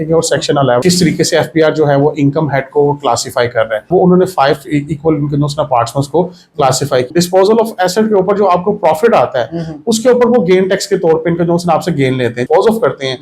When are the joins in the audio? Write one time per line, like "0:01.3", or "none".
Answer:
0:00.8
0:03.9
0:07.1
0:12.4